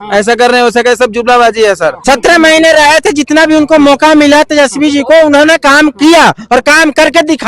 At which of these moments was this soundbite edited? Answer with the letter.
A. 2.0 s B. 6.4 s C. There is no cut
A